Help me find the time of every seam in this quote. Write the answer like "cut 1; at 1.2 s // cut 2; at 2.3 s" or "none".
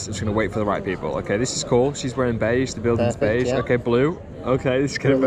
none